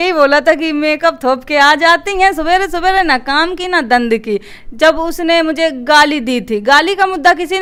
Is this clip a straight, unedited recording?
yes; 0 cuts

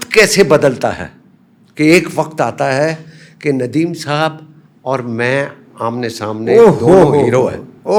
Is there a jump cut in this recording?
no; 0 cuts

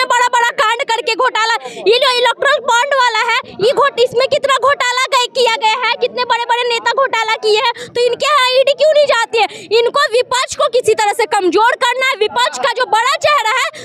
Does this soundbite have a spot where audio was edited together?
no; 0 cuts

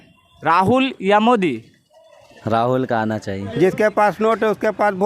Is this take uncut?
no; 1 cut; at 3.5 s

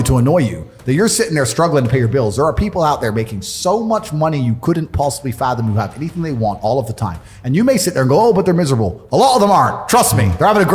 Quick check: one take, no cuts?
yes; 0 cuts

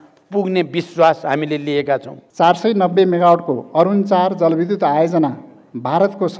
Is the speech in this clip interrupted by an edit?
yes; 1 cut; at 2.2 s

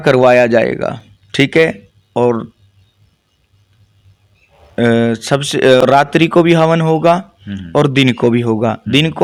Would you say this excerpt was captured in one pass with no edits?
yes; 0 cuts

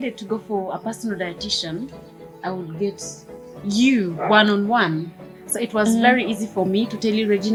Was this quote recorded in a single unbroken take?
yes; 0 cuts

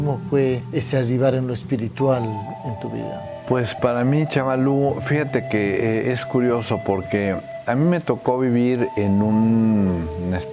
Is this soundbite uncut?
yes; 0 cuts

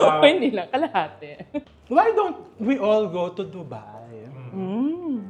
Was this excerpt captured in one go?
no; 1 cut; at 1.7 s

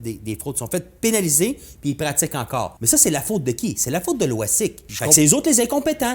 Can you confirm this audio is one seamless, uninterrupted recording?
no; 2 cuts; at 2.8 s, 4.9 s

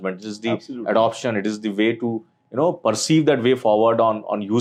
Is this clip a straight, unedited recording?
yes; 0 cuts

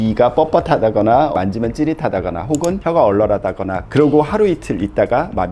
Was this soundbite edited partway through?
yes; 2 cuts; at 1.3 s, 3.8 s

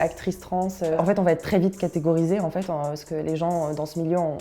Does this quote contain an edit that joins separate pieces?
no; 0 cuts

